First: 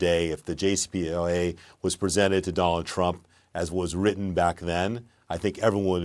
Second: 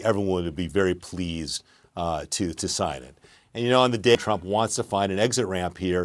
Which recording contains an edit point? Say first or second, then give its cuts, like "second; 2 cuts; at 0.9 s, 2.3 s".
second; 1 cut; at 4.2 s